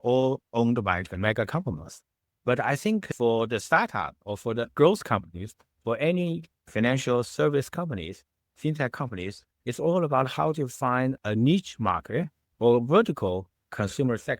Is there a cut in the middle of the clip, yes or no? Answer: yes